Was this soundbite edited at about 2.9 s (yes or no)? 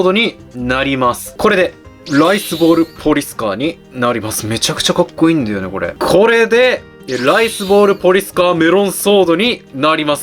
no